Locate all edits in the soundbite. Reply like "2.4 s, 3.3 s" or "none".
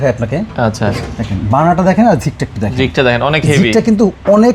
none